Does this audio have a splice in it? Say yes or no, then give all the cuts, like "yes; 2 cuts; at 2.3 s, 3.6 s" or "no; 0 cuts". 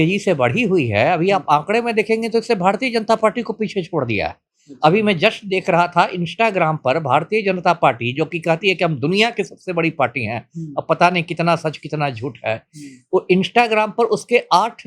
no; 0 cuts